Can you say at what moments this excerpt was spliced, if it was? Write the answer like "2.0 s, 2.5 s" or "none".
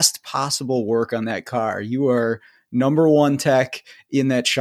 none